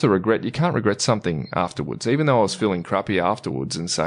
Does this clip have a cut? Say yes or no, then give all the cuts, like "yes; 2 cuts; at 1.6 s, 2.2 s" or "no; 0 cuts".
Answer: no; 0 cuts